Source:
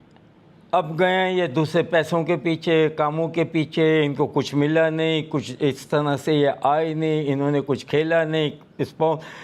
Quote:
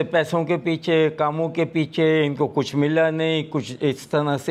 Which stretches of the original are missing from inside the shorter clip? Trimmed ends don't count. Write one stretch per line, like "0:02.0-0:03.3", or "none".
none